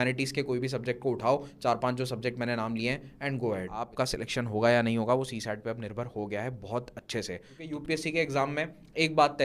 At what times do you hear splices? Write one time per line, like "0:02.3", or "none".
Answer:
0:03.9
0:07.6